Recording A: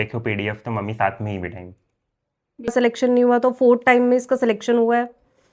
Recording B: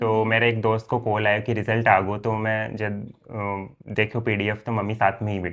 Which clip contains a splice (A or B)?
A